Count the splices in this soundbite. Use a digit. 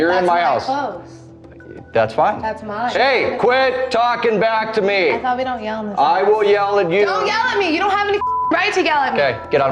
0